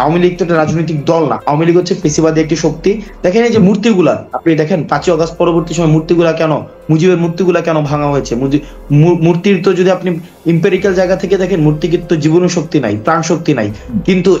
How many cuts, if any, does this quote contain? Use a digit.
1